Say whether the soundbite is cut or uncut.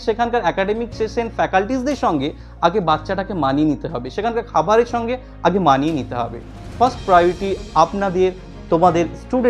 uncut